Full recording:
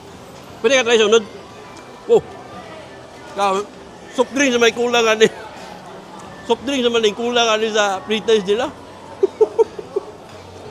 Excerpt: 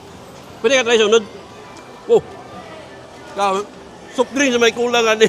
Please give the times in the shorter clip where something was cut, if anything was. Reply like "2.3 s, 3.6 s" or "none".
none